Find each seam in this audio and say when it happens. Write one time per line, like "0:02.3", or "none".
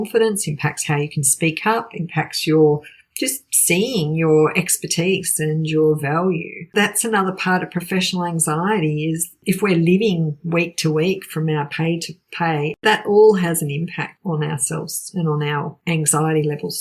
0:06.7
0:09.3
0:12.8
0:14.1
0:15.8